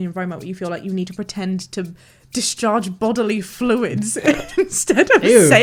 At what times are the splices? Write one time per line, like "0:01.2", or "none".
none